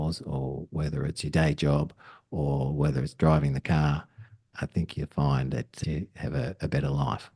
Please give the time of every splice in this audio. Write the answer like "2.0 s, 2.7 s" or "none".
5.8 s